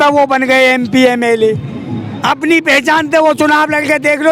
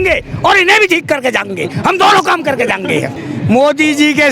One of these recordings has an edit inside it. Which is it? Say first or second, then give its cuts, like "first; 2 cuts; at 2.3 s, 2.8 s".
second; 1 cut; at 3.2 s